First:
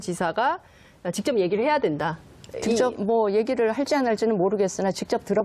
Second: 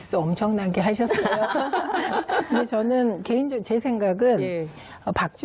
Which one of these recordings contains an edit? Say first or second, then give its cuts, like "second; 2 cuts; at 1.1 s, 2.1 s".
first; 1 cut; at 4.3 s